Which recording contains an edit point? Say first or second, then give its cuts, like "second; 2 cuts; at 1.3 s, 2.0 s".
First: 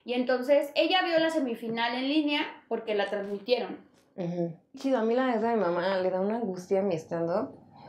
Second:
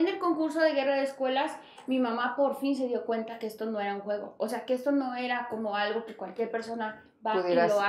first; 1 cut; at 4.8 s